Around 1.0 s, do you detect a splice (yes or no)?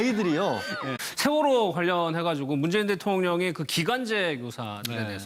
no